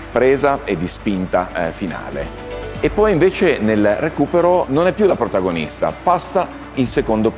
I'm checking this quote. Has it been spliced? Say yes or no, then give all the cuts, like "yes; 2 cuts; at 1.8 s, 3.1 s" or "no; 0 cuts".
yes; 1 cut; at 4.7 s